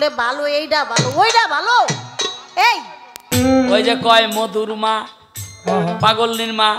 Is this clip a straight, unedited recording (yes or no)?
no